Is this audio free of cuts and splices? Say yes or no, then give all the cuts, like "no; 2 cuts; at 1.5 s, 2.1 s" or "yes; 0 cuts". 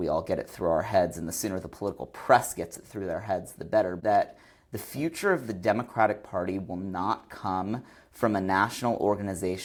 yes; 0 cuts